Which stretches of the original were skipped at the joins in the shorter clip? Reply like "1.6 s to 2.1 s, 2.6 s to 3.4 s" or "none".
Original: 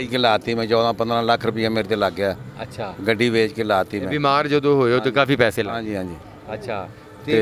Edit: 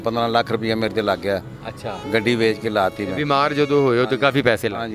none